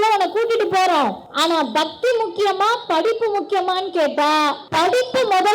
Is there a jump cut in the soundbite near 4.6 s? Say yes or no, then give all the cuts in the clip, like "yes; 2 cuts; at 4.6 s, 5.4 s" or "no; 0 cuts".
yes; 2 cuts; at 1.2 s, 4.6 s